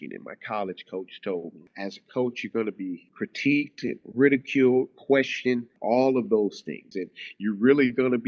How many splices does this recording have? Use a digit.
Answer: 4